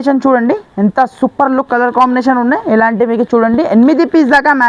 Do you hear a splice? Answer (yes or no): no